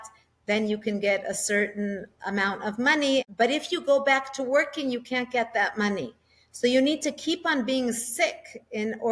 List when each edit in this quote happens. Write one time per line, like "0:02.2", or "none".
0:03.2